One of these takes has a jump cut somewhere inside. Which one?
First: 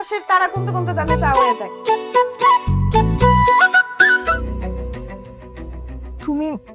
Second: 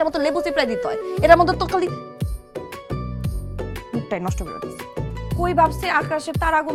first; 1 cut; at 4.2 s

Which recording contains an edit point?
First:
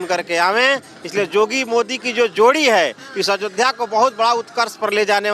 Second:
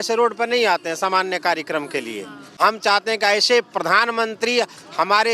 second; 1 cut; at 2.6 s

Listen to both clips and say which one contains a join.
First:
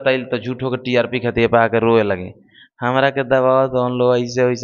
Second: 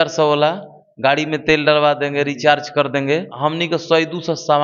second; 1 cut; at 3.3 s

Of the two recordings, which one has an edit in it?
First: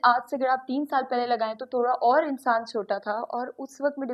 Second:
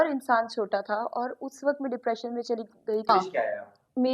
second; 1 cut; at 3.1 s

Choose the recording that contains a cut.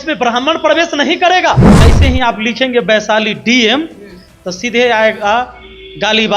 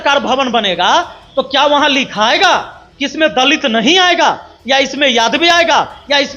first; 1 cut; at 1.7 s

